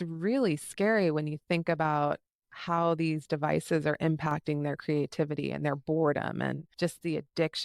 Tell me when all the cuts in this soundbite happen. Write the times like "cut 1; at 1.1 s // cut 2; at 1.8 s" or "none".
cut 1; at 6.6 s